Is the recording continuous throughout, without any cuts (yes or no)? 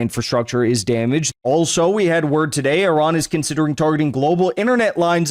no